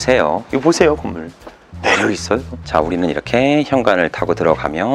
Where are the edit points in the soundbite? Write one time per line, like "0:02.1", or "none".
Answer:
0:02.6